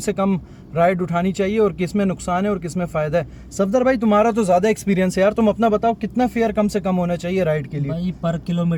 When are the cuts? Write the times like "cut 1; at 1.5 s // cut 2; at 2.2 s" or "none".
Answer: none